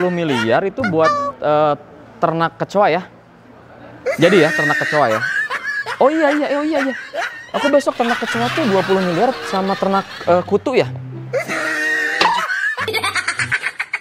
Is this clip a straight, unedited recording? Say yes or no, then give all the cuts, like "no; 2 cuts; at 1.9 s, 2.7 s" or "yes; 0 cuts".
yes; 0 cuts